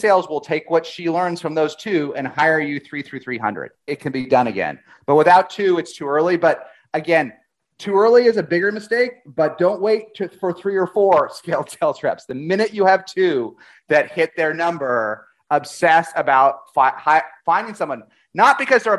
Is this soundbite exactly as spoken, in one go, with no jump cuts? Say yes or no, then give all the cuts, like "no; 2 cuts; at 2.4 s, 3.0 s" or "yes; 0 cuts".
yes; 0 cuts